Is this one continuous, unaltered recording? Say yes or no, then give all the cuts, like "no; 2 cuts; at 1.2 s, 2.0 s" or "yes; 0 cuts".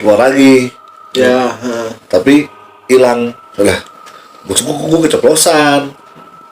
no; 1 cut; at 3.4 s